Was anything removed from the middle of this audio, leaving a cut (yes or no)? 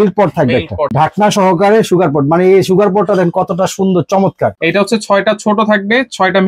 yes